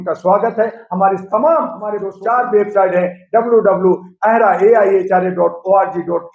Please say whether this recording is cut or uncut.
cut